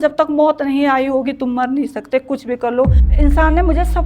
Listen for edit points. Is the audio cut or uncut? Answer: cut